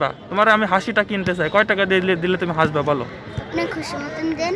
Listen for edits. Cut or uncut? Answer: uncut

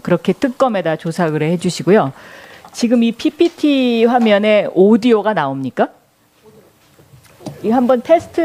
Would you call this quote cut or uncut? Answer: uncut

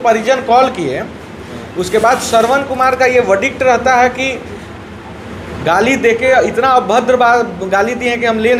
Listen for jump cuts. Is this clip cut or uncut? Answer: uncut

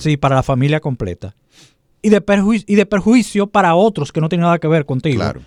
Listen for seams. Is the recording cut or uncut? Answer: uncut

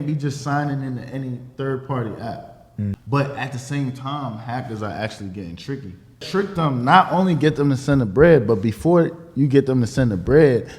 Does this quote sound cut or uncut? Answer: cut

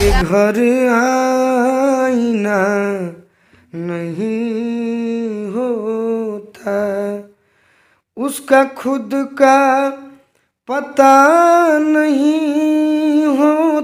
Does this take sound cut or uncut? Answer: uncut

